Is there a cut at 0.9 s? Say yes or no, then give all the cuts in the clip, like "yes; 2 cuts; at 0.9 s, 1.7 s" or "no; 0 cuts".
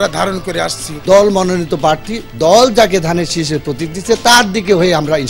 yes; 1 cut; at 0.9 s